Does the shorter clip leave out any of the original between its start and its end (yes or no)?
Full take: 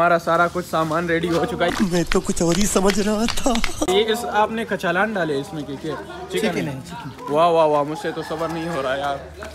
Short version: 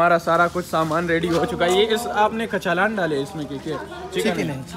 yes